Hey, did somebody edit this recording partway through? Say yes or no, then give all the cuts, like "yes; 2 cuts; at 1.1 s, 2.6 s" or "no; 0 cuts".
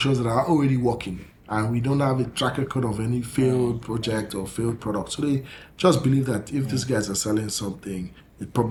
no; 0 cuts